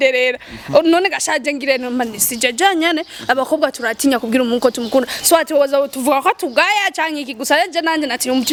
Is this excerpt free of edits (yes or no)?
yes